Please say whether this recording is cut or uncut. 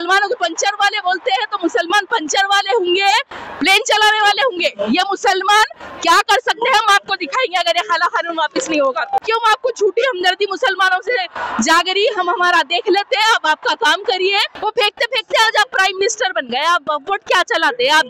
cut